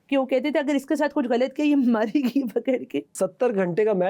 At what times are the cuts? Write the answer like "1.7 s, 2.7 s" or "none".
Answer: 3.1 s